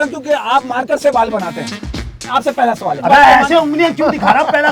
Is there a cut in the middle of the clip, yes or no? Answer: yes